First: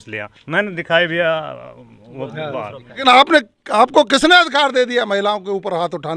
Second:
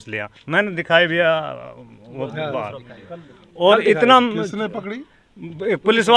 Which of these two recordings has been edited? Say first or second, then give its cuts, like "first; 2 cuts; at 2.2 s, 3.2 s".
first; 1 cut; at 3.0 s